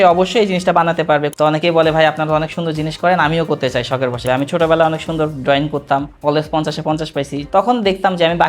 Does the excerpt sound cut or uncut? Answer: cut